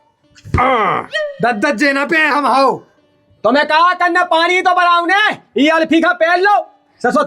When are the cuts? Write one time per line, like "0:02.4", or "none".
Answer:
0:01.1